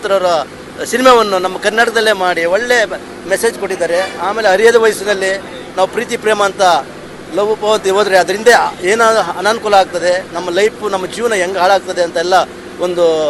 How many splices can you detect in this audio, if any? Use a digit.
0